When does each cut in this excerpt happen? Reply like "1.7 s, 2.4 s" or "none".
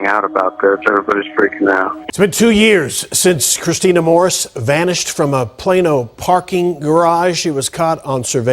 2.0 s

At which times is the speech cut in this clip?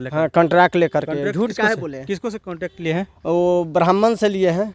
none

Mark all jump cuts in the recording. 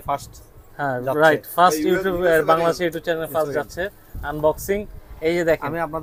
none

